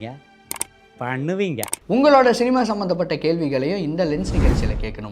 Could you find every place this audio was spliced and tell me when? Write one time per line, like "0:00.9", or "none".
0:01.7